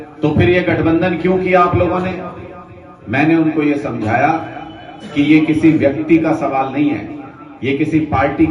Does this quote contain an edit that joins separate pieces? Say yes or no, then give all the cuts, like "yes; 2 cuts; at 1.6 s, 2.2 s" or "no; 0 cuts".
no; 0 cuts